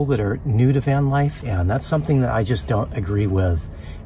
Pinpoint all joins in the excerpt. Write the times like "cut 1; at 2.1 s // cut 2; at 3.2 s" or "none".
cut 1; at 1.4 s